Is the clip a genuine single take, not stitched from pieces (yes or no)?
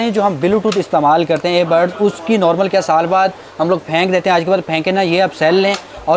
yes